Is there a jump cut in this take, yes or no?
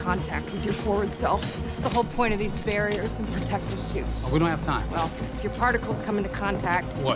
no